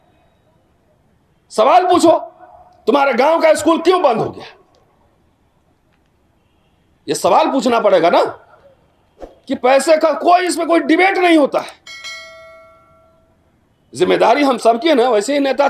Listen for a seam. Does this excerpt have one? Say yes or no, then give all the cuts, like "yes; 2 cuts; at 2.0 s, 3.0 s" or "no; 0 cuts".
no; 0 cuts